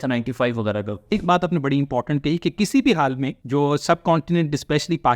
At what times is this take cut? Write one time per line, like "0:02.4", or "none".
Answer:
0:01.1
0:03.3